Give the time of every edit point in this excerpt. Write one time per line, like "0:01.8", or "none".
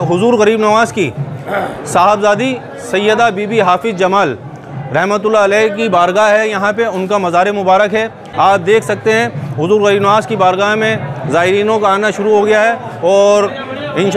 0:08.2